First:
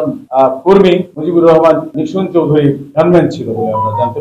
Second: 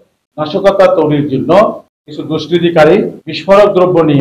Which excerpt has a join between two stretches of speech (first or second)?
first